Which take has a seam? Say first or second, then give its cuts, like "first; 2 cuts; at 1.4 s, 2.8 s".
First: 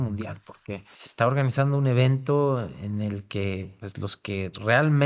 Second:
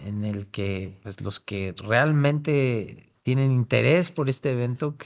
first; 1 cut; at 1.0 s